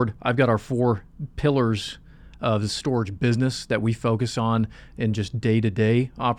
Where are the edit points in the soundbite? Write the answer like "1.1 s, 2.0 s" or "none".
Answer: none

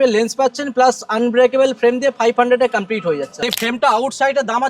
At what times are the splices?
3.5 s

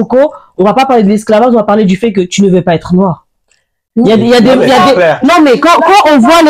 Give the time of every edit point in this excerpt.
none

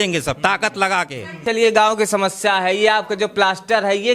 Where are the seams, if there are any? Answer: 1.4 s

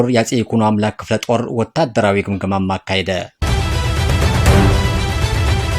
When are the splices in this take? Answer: 3.4 s

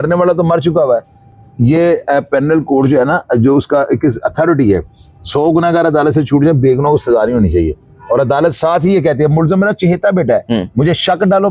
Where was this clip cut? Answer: none

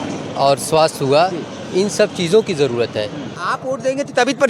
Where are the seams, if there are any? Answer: 3.4 s

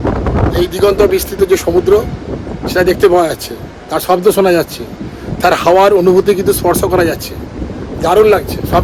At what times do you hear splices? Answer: none

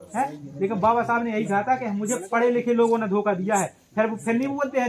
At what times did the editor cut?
none

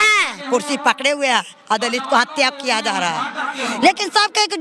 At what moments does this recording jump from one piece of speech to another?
none

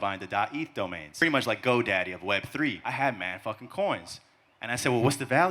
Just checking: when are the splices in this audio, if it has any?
1.2 s, 2.8 s

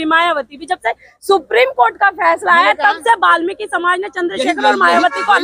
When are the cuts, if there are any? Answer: none

